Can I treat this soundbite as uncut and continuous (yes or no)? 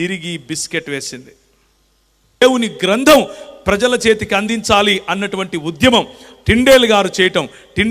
no